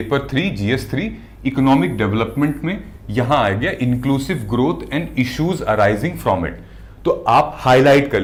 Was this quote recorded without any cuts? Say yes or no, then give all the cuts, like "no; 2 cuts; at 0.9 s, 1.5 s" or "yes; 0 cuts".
yes; 0 cuts